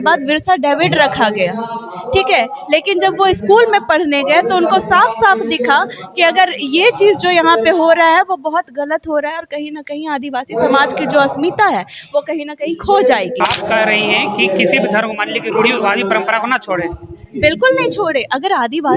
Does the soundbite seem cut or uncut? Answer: cut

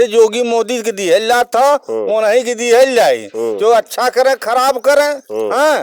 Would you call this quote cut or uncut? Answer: uncut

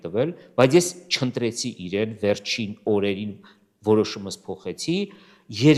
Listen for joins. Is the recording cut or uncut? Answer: uncut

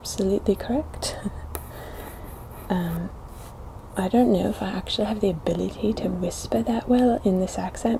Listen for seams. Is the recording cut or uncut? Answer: uncut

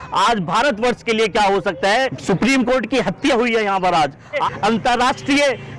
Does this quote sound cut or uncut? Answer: cut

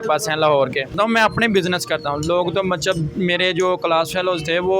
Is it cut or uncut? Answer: cut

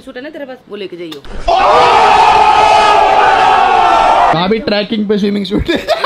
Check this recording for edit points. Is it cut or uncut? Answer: uncut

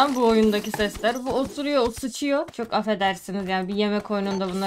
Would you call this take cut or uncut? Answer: uncut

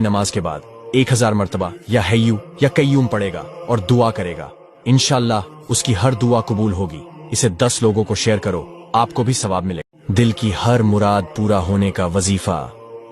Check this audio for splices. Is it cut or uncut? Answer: cut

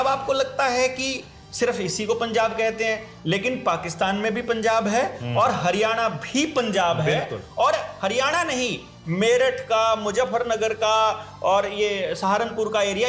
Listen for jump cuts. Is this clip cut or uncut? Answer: uncut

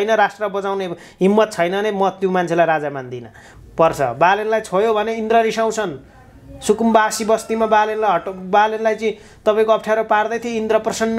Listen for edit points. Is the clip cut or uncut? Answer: cut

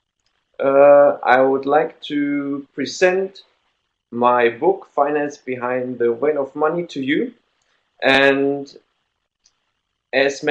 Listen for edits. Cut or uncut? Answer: uncut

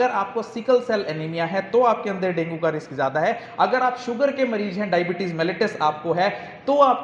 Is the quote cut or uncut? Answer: uncut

